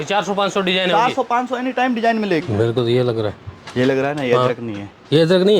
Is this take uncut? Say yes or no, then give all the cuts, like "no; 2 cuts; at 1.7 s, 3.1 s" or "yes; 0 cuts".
no; 1 cut; at 2.4 s